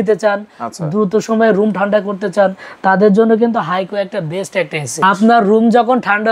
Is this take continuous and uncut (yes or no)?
no